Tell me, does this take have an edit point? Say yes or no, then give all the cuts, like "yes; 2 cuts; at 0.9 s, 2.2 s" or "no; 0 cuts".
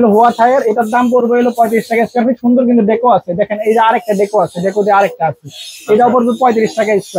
no; 0 cuts